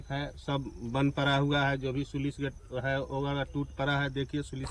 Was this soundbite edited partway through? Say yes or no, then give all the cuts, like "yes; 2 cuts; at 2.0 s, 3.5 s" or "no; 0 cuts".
no; 0 cuts